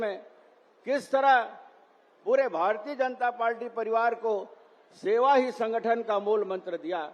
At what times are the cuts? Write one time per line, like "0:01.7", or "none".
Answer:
none